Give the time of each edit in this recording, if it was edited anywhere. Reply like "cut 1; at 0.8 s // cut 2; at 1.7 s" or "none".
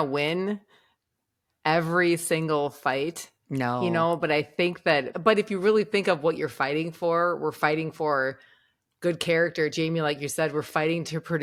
none

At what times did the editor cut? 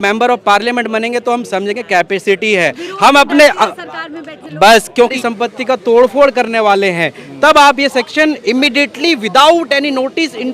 cut 1; at 5.2 s

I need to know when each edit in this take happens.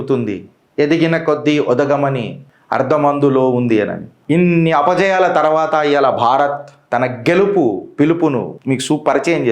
cut 1; at 4.1 s // cut 2; at 8.5 s

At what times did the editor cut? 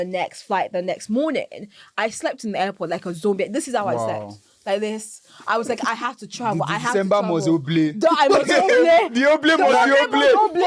none

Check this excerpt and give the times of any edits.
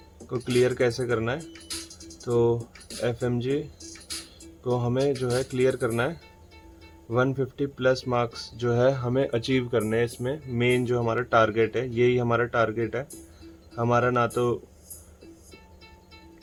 none

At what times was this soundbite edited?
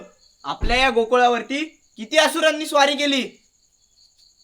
none

